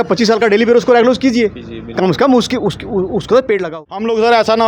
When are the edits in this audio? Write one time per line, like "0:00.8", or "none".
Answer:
0:03.7